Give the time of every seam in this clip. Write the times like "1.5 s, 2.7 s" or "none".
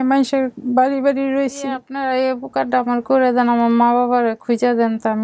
1.9 s